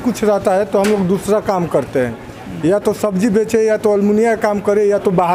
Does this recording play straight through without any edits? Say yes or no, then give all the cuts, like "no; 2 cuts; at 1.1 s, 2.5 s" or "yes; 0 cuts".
yes; 0 cuts